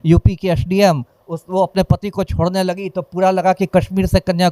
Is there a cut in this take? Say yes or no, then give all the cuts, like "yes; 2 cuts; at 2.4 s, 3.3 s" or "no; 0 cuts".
no; 0 cuts